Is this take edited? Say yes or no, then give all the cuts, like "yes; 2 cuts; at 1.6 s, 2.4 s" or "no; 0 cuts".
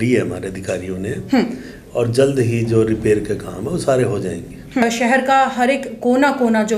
yes; 1 cut; at 4.8 s